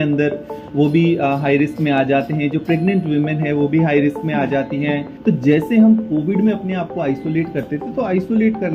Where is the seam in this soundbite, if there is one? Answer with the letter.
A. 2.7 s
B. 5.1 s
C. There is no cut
B